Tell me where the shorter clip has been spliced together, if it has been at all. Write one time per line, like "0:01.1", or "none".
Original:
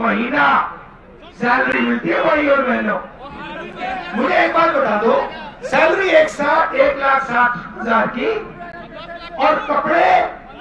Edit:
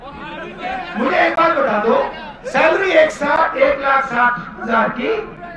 none